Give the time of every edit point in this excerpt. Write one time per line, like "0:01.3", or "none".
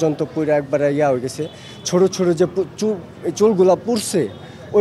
none